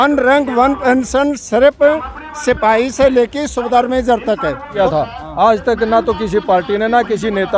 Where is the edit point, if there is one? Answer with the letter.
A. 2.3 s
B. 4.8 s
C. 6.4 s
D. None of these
B